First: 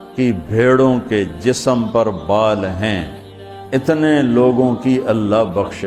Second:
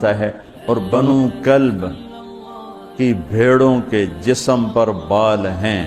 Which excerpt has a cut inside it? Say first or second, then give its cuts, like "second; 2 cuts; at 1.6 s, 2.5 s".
second; 1 cut; at 0.9 s